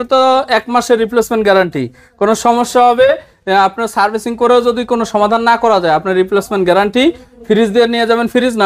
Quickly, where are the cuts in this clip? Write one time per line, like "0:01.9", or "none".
none

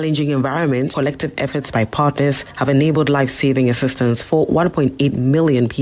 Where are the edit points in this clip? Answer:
0:00.9

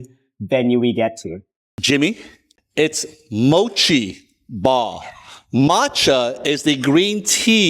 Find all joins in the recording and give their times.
0:01.7

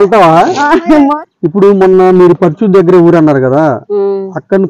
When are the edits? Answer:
0:01.1

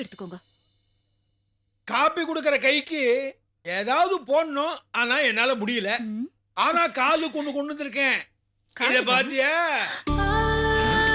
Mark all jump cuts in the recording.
none

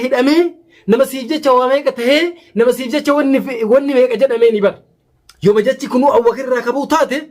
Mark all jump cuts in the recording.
0:04.8

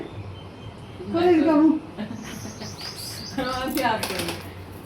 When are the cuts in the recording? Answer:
0:02.1

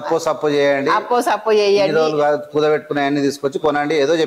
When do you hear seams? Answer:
none

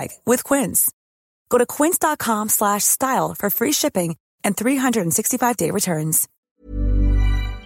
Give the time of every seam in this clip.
0:06.3

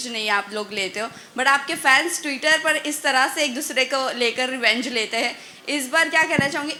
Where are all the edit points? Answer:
none

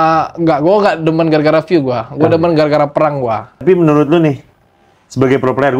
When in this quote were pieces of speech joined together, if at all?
0:03.6

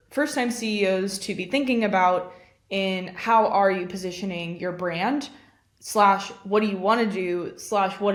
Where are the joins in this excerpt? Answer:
none

